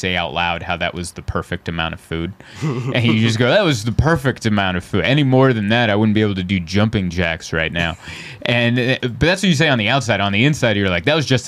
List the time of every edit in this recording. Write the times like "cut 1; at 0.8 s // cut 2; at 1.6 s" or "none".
none